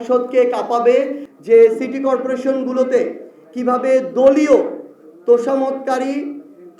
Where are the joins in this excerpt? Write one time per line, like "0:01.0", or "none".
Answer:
0:01.2